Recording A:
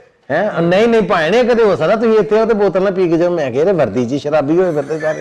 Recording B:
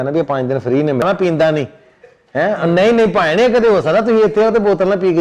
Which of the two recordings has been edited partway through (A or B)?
B